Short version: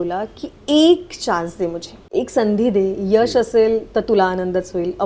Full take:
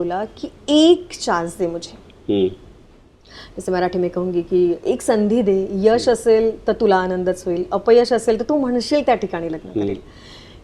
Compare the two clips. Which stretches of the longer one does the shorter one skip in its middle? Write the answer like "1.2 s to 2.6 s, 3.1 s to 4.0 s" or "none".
2.1 s to 4.8 s